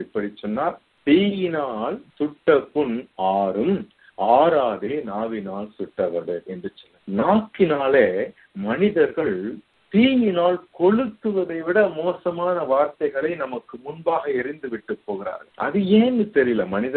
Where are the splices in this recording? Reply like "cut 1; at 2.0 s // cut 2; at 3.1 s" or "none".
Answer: cut 1; at 0.9 s // cut 2; at 2.0 s // cut 3; at 6.9 s